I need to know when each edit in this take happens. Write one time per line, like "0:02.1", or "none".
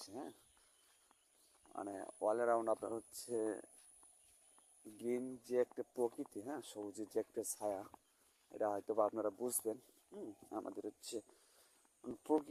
none